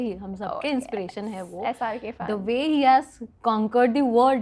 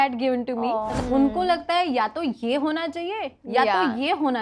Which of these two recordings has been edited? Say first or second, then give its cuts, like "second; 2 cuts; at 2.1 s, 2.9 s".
second; 1 cut; at 1.0 s